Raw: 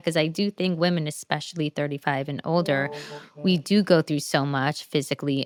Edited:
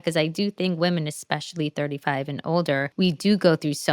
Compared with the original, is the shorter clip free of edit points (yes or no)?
no